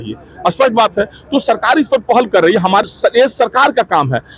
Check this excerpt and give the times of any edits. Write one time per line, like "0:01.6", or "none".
0:02.8